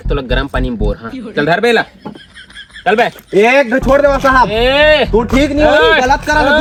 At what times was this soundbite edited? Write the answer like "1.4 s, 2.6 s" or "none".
none